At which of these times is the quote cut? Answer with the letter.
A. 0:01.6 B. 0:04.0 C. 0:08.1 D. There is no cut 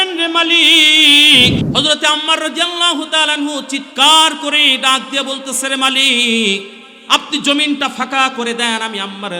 A